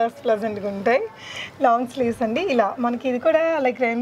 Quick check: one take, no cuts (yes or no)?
yes